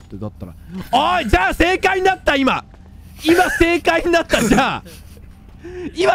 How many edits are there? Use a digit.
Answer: 0